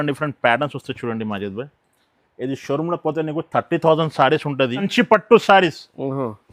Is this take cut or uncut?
cut